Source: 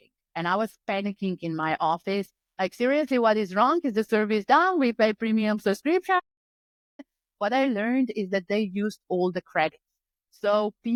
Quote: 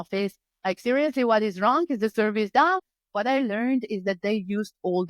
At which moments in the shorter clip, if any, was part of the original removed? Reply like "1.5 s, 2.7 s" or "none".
2.8 s